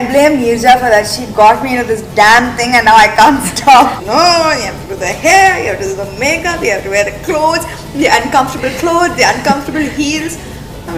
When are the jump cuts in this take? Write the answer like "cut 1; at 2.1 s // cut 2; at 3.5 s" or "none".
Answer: cut 1; at 4.0 s